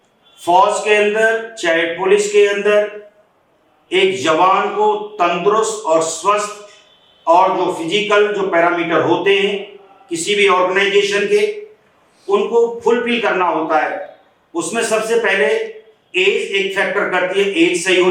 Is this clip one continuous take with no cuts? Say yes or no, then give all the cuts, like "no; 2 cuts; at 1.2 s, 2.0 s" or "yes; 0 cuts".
yes; 0 cuts